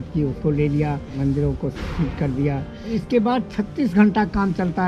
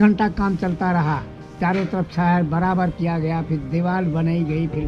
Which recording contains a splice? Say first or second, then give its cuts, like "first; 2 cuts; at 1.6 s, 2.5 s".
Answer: first; 2 cuts; at 1.2 s, 2.9 s